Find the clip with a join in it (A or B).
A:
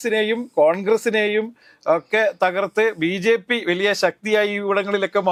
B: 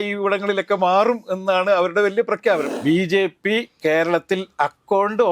B